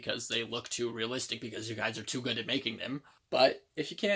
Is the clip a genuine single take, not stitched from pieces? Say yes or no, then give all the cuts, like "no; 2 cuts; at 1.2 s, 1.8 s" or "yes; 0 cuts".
no; 1 cut; at 3.1 s